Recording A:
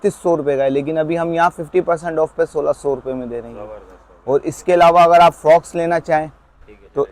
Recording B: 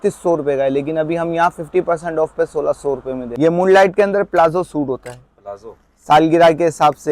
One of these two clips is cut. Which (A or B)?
B